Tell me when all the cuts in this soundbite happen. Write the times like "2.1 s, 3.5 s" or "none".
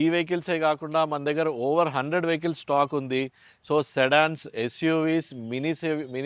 none